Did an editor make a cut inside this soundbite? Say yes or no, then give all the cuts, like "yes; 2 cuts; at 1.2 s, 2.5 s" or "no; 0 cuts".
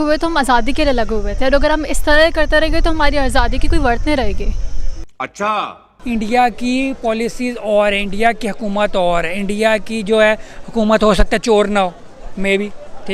yes; 1 cut; at 5.7 s